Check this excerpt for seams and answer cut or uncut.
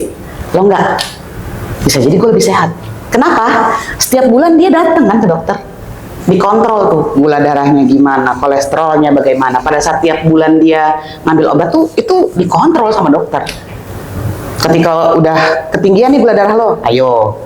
uncut